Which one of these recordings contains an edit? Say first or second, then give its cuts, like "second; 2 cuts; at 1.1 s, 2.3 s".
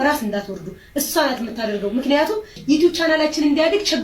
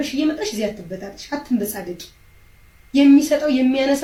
first; 1 cut; at 2.6 s